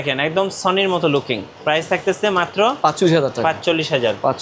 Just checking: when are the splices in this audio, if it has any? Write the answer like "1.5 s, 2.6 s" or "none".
none